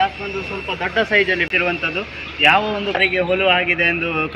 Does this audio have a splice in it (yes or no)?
no